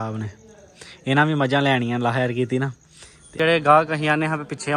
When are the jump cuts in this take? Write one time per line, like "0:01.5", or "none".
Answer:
0:03.3